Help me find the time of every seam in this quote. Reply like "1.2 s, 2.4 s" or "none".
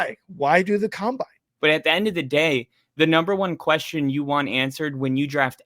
1.4 s